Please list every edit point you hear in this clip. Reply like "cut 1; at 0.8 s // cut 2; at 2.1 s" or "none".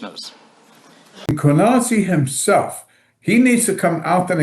cut 1; at 1.4 s